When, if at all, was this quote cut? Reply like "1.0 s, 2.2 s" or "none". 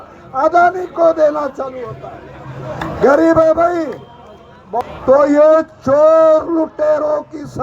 4.8 s

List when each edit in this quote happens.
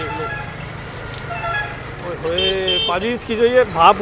none

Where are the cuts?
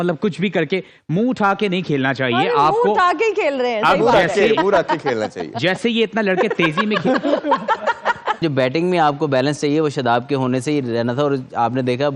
8.4 s

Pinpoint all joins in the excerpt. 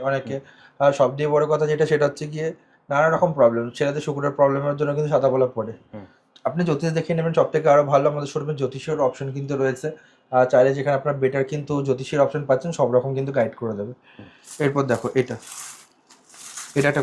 none

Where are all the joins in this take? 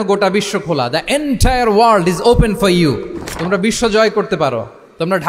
none

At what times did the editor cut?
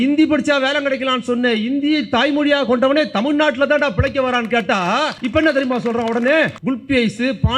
5.2 s, 6.6 s

